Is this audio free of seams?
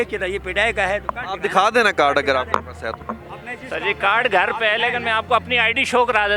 yes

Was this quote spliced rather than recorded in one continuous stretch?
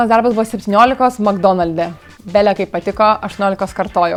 no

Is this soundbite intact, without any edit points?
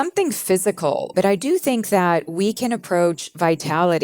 no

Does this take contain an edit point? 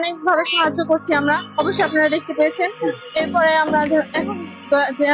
no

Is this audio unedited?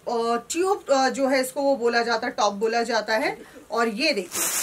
yes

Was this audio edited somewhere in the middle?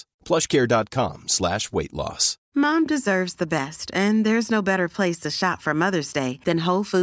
yes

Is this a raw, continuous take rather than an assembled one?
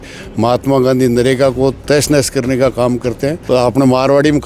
no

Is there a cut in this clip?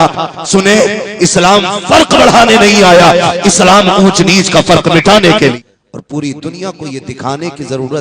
yes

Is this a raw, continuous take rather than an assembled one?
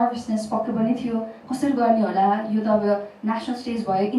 yes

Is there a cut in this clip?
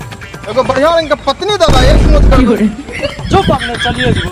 no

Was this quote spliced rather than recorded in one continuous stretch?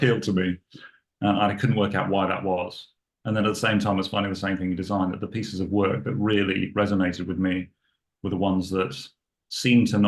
no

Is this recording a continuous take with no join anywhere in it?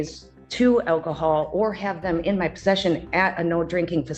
yes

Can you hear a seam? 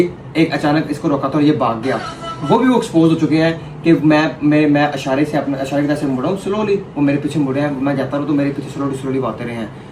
no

